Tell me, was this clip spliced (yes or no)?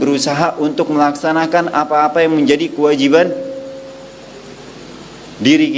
no